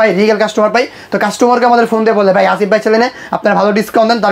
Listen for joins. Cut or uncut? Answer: uncut